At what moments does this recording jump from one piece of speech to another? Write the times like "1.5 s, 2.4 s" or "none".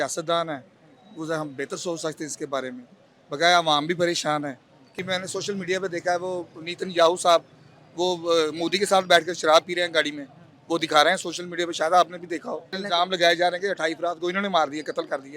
5.0 s, 12.7 s